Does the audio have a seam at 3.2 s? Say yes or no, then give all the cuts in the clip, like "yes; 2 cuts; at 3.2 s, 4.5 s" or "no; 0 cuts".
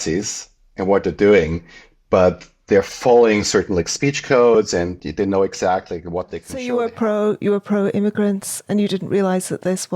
no; 1 cut; at 6.5 s